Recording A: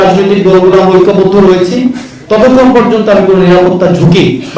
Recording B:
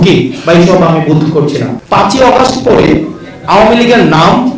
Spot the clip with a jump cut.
B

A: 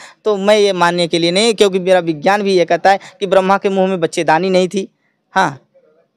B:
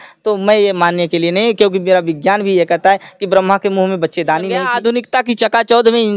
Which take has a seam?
B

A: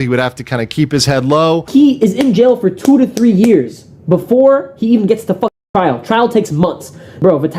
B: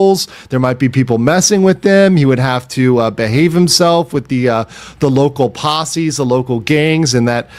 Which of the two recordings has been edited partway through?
A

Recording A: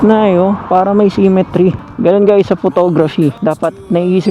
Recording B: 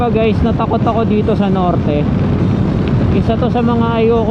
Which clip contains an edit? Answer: A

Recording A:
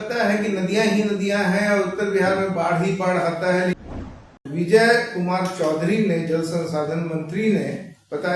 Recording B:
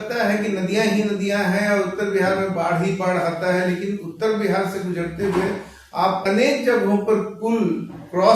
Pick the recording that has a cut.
A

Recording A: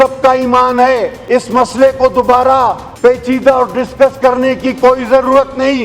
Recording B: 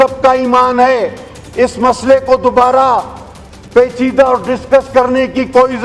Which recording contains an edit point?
A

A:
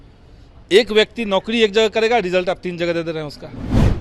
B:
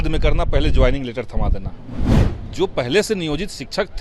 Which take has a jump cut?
B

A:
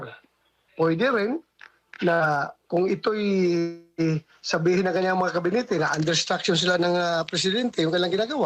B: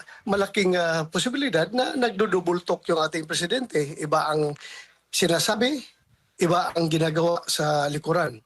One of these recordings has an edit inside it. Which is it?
B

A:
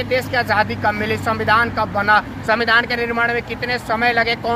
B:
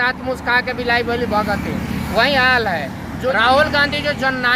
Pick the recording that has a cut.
B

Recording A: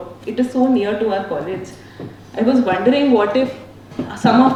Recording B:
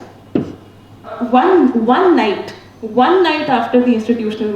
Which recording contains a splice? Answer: B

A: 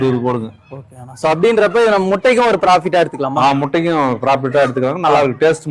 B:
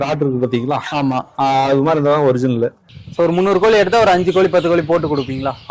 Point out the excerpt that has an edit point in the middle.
B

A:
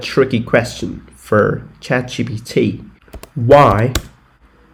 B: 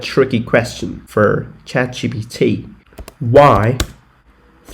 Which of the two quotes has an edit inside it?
B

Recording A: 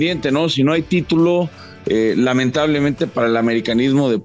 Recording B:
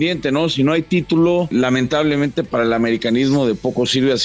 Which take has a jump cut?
B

